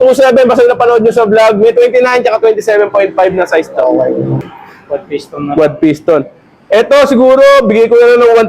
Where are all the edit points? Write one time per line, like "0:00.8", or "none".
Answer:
0:04.4